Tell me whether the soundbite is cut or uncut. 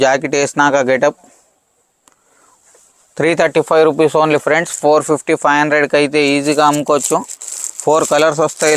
uncut